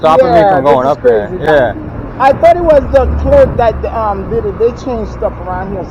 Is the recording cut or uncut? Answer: uncut